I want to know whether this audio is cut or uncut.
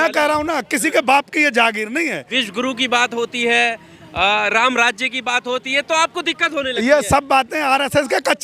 cut